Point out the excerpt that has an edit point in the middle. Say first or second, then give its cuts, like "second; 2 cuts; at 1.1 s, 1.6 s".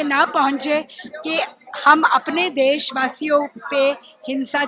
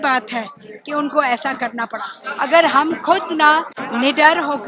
second; 2 cuts; at 2.2 s, 3.8 s